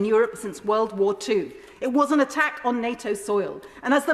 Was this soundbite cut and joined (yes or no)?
no